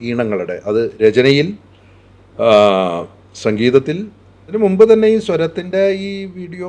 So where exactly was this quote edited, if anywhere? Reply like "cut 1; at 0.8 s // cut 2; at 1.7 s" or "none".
cut 1; at 4.5 s

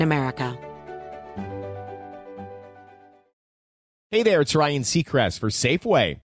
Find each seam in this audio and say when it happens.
cut 1; at 3.3 s

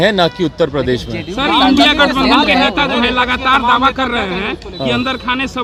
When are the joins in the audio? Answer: none

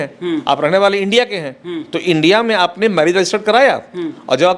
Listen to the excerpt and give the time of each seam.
none

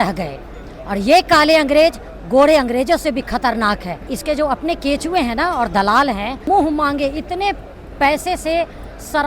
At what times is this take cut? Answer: cut 1; at 4.1 s // cut 2; at 6.5 s

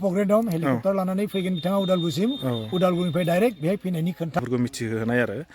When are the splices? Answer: cut 1; at 4.4 s

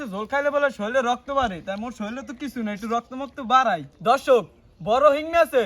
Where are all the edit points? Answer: cut 1; at 3.9 s

